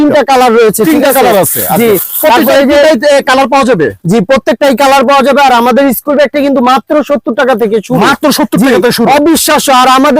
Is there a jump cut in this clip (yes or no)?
no